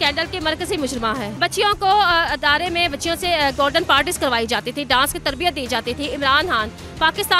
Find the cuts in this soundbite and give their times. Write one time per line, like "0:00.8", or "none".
0:01.3